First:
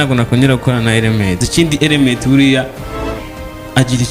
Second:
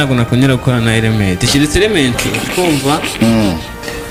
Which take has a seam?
first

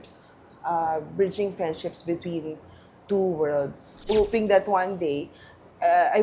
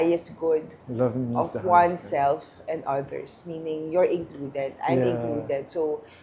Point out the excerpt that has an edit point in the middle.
first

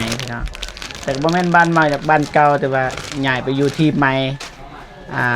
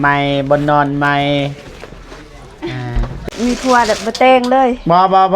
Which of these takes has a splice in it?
second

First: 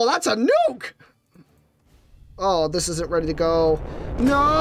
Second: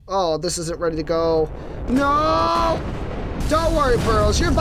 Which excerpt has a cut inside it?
second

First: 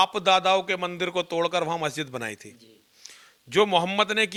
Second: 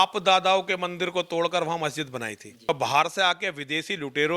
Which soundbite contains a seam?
second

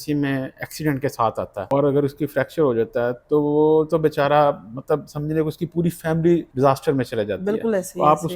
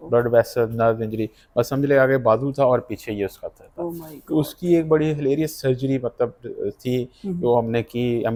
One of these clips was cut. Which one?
first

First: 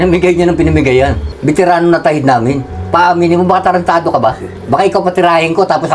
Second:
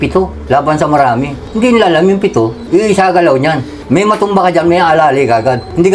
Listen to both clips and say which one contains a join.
first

